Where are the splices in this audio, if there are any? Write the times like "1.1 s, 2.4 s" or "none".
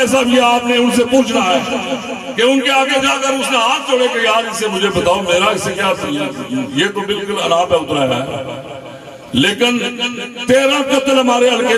none